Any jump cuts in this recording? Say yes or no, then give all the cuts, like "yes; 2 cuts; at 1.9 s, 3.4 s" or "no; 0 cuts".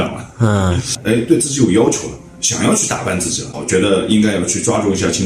yes; 2 cuts; at 0.9 s, 3.6 s